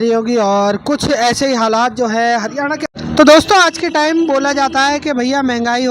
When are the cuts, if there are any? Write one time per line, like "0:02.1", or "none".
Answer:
0:02.8